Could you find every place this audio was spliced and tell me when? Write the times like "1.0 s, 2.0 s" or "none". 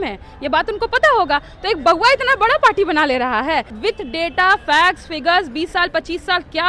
3.7 s